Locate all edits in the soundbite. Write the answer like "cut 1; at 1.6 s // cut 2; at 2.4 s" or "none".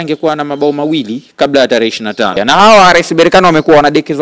cut 1; at 2.4 s